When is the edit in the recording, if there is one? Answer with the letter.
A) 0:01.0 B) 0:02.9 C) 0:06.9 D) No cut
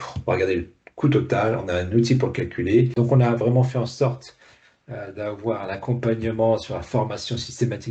B